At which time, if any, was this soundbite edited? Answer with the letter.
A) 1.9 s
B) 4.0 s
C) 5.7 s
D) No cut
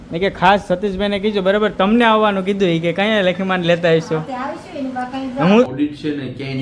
C